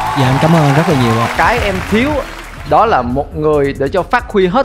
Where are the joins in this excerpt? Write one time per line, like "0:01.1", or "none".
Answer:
0:01.3